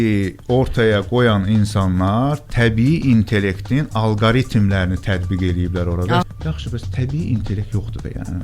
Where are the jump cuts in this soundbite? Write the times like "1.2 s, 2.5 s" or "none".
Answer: 6.2 s